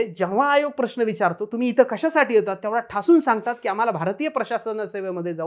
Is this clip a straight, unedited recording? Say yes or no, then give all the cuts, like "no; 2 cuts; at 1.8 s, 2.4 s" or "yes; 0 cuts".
yes; 0 cuts